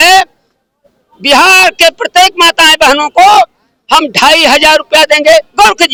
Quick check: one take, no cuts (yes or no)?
yes